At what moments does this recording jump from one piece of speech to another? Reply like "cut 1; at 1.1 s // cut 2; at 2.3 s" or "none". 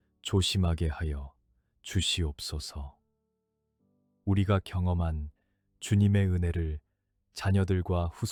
none